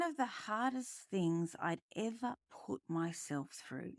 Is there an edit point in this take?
no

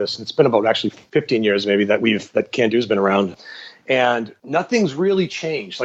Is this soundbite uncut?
no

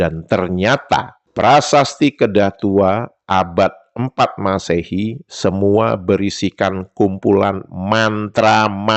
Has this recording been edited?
yes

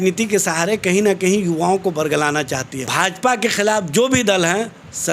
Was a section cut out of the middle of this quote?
yes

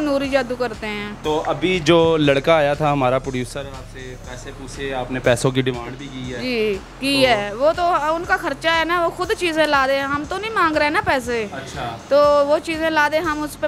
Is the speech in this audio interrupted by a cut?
yes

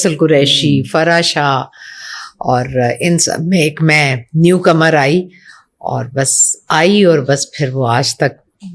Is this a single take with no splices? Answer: yes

